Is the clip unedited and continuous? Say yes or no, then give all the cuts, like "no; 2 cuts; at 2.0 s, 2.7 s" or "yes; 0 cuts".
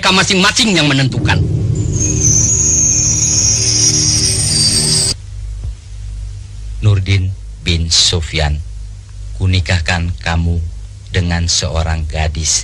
no; 1 cut; at 5.1 s